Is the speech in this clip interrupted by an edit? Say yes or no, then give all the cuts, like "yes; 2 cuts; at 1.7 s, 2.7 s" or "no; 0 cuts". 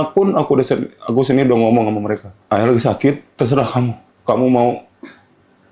yes; 2 cuts; at 2.3 s, 4.1 s